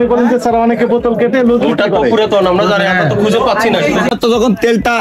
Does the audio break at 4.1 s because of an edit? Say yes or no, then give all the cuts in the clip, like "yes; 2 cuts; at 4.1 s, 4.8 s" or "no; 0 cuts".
yes; 1 cut; at 4.1 s